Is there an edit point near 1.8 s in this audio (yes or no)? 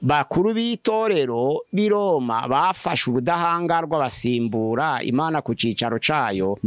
no